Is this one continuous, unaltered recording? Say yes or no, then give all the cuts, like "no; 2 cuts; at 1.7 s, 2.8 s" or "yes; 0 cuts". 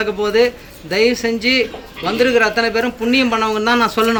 yes; 0 cuts